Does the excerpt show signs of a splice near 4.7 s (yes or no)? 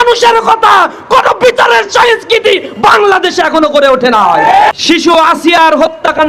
yes